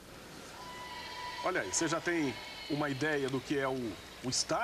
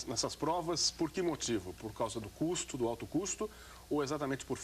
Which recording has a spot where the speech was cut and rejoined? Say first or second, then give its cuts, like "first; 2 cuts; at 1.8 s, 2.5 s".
second; 1 cut; at 2.4 s